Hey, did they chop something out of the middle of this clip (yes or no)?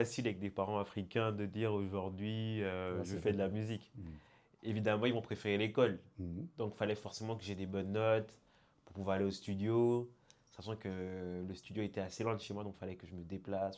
no